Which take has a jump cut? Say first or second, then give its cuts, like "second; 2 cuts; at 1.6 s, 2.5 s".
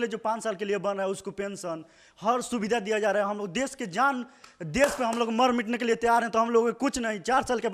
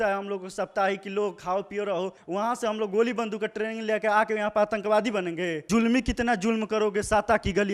second; 2 cuts; at 2.2 s, 5.6 s